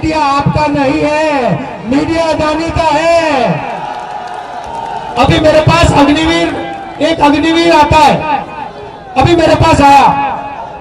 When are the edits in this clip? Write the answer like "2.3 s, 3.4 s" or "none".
4.7 s